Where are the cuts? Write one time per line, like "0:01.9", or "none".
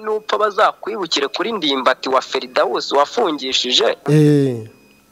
0:04.0